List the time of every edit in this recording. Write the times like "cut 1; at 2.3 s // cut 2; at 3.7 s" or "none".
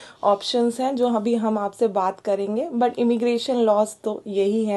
none